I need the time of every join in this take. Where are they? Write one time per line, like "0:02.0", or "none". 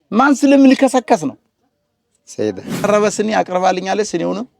0:02.8